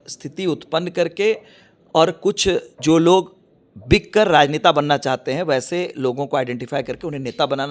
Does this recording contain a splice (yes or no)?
no